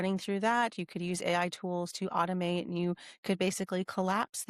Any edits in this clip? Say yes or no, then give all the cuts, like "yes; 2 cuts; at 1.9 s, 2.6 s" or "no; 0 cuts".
no; 0 cuts